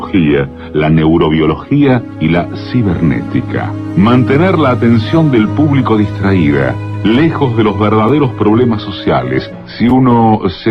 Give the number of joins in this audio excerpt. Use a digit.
0